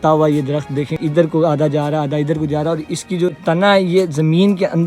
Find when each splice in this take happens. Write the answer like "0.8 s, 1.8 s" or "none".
1.0 s, 3.4 s